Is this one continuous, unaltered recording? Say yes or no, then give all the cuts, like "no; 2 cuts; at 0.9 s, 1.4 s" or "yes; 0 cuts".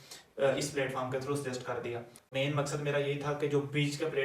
no; 1 cut; at 2.1 s